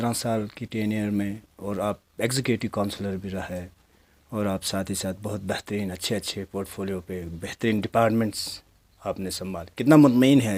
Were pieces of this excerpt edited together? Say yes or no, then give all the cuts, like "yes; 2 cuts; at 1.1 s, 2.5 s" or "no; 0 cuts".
no; 0 cuts